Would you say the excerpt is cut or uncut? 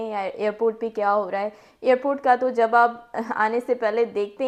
uncut